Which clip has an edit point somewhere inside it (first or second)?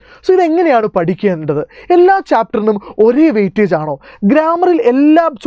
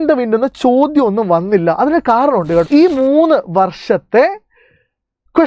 second